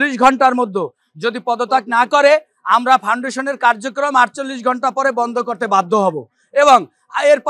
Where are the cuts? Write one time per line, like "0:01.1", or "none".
none